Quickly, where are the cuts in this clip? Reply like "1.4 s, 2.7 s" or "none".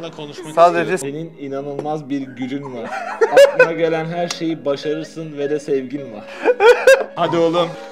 1.0 s

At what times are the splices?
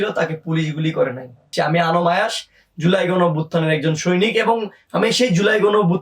1.5 s

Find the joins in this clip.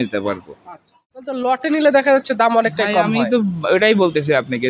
1.3 s

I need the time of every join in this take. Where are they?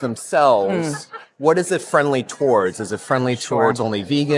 none

